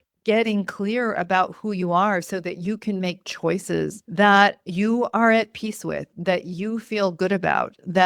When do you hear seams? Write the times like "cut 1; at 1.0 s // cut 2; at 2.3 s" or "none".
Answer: cut 1; at 4.0 s // cut 2; at 4.6 s